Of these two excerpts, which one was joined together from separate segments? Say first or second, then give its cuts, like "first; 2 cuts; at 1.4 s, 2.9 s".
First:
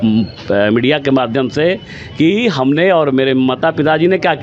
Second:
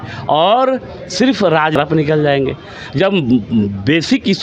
second; 1 cut; at 1.7 s